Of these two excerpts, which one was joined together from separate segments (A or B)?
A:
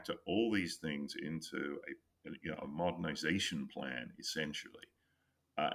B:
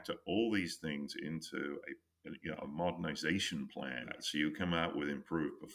B